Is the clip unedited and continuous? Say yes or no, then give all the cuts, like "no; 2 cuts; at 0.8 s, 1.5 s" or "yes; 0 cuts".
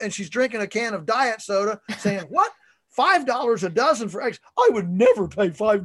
yes; 0 cuts